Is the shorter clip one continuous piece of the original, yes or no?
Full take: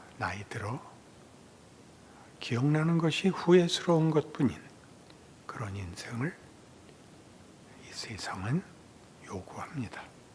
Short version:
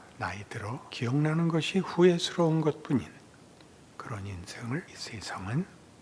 no